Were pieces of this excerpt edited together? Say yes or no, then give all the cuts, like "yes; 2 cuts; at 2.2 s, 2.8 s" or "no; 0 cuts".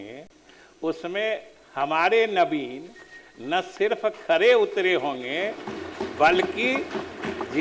no; 0 cuts